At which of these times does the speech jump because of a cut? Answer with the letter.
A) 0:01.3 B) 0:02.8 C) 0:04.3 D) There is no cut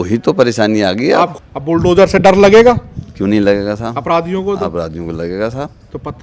A